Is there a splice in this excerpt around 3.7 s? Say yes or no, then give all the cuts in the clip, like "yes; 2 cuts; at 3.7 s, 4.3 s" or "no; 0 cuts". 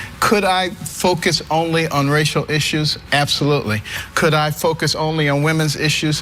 yes; 1 cut; at 3.7 s